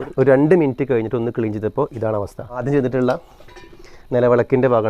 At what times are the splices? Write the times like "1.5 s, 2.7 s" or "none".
2.6 s